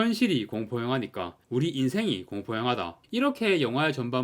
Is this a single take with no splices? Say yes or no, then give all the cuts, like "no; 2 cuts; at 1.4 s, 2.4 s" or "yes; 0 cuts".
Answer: no; 1 cut; at 3.0 s